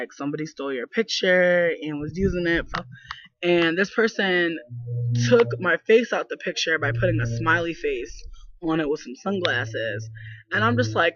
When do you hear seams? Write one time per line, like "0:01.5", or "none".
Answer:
none